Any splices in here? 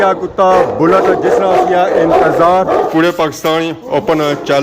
yes; 1 cut; at 2.9 s

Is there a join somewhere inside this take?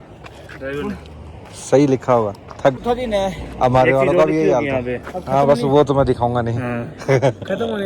yes; 1 cut; at 2.8 s

